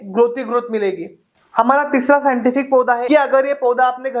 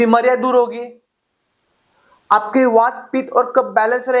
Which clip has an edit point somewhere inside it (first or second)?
first